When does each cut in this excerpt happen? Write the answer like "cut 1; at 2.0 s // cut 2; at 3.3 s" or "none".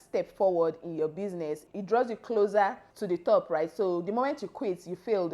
cut 1; at 1.7 s // cut 2; at 2.9 s